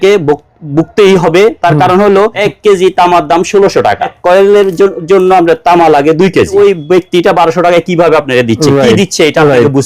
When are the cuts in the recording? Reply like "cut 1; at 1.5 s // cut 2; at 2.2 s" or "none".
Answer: cut 1; at 2.4 s // cut 2; at 4.2 s // cut 3; at 6.5 s